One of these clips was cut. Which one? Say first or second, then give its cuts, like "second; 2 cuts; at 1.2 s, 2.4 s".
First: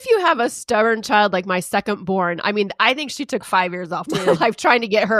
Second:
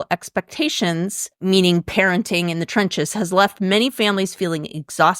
second; 1 cut; at 1.4 s